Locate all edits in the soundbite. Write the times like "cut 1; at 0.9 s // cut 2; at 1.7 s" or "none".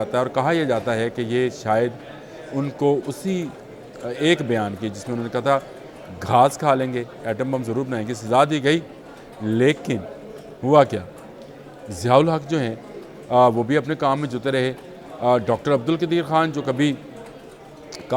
none